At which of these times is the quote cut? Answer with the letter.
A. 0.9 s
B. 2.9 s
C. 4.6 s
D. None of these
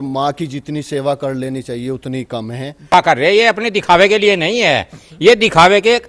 B